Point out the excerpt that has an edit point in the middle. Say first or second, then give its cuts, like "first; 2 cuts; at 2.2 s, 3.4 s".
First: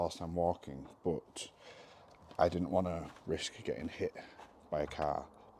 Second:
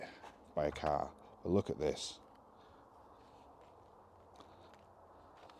second; 1 cut; at 3.6 s